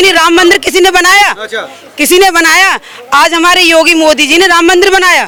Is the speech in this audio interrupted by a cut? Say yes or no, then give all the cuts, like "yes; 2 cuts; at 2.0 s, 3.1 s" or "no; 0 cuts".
no; 0 cuts